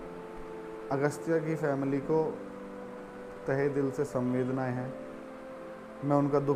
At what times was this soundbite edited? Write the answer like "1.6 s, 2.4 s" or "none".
none